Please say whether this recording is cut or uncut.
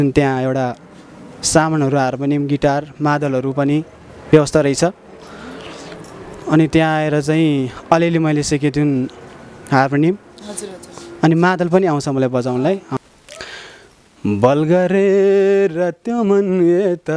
cut